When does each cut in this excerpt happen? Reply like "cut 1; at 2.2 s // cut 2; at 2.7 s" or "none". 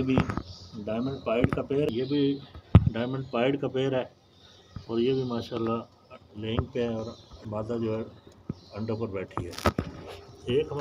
cut 1; at 1.9 s // cut 2; at 7.3 s